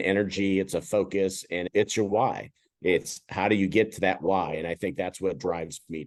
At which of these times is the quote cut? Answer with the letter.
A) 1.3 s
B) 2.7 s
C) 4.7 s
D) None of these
D